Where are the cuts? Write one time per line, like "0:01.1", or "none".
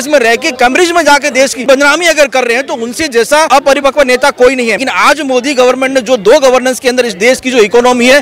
0:01.7
0:03.5
0:04.8